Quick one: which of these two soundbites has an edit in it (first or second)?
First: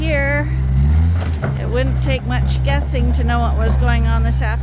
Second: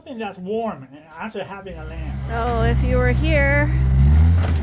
second